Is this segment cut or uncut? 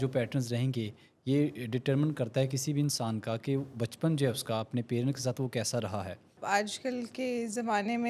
cut